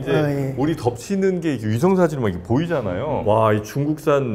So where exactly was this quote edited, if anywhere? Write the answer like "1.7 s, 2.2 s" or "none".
3.2 s